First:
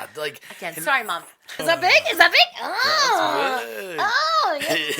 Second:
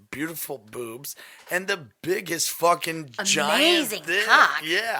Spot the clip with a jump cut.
first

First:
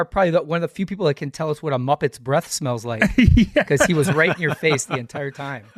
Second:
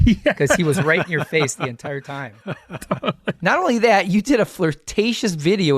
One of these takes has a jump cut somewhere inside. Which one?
second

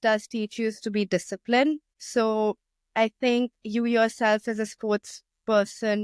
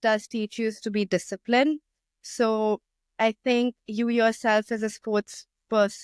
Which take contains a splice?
first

